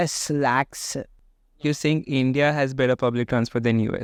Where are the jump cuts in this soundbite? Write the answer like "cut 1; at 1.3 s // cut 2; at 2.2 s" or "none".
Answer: none

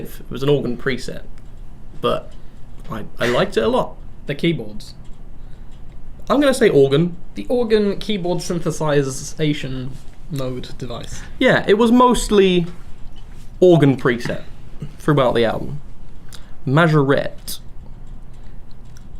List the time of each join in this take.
cut 1; at 6.9 s

